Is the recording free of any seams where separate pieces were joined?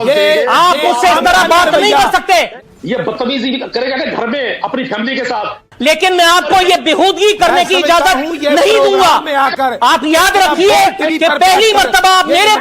no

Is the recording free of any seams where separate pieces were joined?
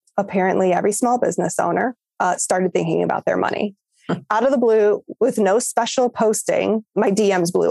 no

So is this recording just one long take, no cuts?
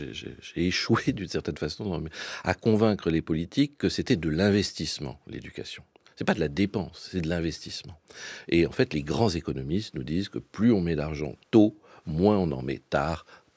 yes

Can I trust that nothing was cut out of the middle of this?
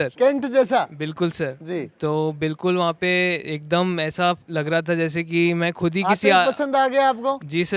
yes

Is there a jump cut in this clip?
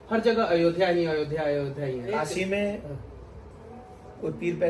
yes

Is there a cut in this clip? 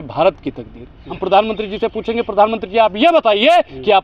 yes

